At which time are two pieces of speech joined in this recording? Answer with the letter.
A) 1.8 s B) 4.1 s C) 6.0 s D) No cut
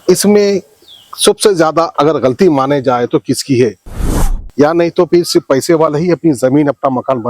B